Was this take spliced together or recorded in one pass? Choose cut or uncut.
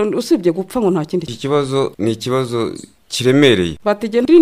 cut